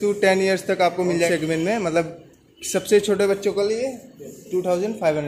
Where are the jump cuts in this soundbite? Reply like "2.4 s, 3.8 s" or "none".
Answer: 1.3 s